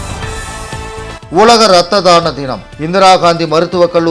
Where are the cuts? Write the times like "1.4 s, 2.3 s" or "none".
none